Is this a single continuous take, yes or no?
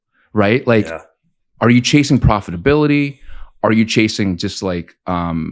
yes